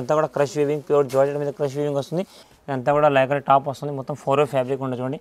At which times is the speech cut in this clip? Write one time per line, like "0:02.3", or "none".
0:02.4